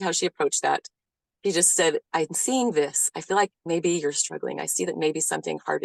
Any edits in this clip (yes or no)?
no